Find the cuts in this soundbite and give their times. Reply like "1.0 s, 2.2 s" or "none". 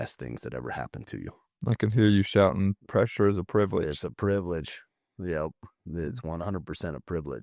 none